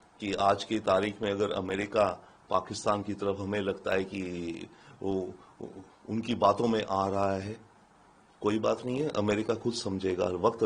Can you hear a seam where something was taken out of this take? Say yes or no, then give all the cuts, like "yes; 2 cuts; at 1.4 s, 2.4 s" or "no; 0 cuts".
no; 0 cuts